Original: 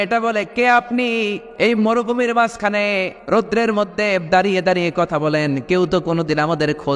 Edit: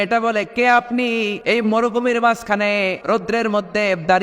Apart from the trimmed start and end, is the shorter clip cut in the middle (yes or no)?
yes